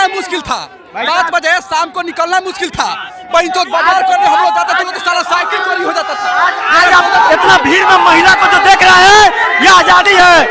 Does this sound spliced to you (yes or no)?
no